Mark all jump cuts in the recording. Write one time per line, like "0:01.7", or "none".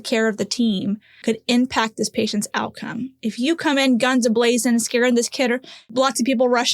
0:01.1
0:05.8

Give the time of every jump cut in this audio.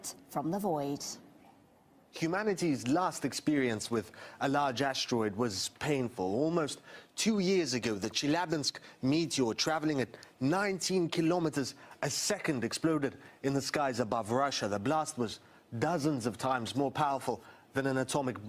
0:09.6

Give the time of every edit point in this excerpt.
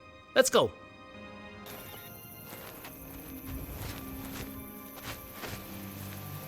0:01.3

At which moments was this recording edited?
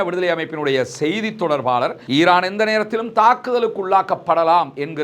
0:02.0

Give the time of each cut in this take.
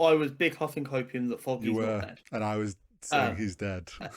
0:02.2

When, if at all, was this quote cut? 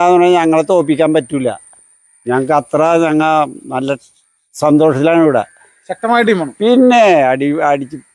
none

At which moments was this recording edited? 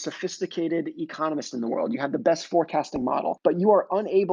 0:03.4

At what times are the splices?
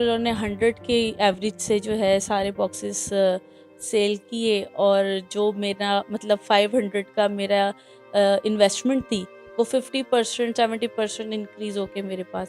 none

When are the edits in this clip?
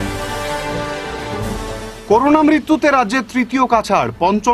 none

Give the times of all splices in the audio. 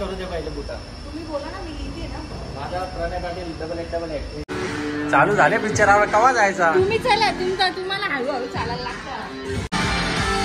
0:04.5
0:09.7

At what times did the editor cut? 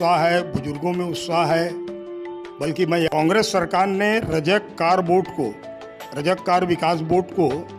0:03.1

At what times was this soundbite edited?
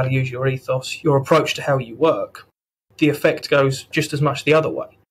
0:00.9

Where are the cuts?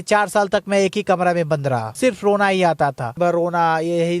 0:01.9
0:03.1

